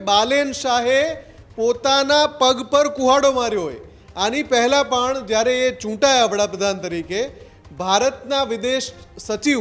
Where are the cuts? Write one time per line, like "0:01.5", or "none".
none